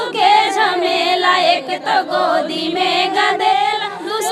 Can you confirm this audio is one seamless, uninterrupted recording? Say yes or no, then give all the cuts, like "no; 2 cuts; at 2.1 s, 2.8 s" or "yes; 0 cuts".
yes; 0 cuts